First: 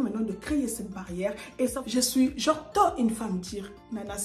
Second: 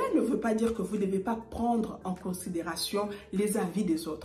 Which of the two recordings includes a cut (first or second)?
first